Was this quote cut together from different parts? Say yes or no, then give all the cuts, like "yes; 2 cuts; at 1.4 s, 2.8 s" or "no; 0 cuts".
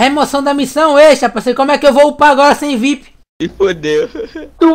no; 0 cuts